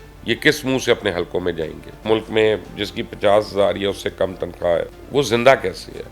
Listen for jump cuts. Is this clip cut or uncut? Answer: cut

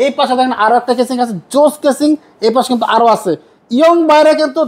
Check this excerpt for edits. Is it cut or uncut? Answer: uncut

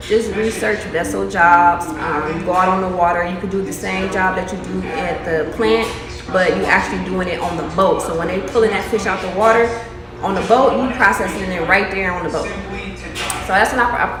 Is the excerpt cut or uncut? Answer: uncut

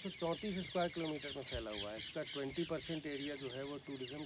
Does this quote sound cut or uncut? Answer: uncut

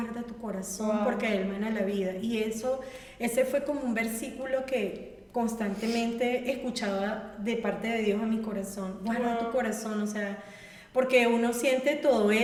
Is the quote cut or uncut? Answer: uncut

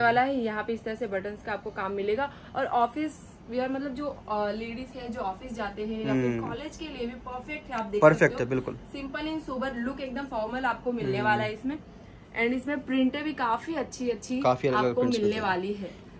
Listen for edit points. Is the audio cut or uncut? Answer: uncut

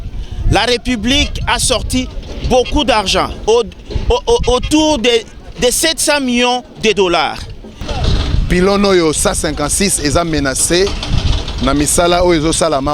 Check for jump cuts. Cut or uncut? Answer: cut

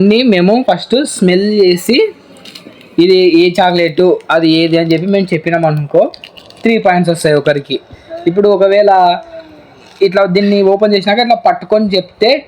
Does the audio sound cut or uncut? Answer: cut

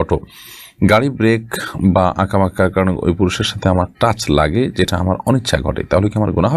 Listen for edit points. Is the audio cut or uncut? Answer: uncut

